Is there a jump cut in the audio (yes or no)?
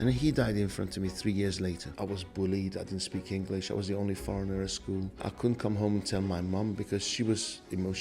yes